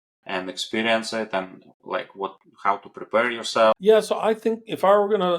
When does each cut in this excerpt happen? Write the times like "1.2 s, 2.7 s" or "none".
3.7 s

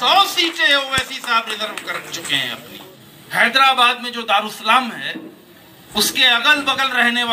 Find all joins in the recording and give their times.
2.9 s

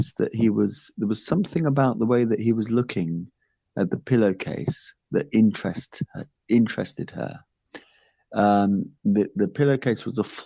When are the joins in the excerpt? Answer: none

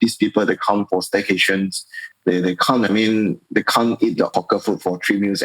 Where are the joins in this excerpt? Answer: 4.3 s

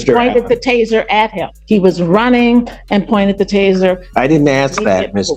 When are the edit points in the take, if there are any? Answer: 1.5 s

